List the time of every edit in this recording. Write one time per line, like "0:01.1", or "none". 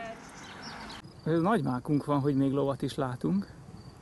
0:01.1